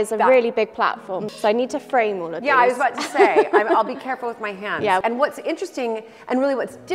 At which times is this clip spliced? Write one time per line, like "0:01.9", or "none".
0:01.3
0:05.0